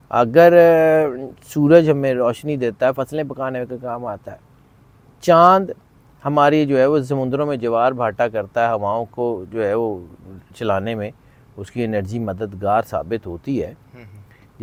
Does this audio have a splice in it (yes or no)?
no